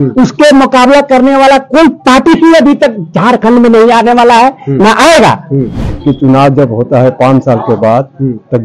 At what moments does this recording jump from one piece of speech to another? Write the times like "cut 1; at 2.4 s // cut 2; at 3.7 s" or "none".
cut 1; at 5.8 s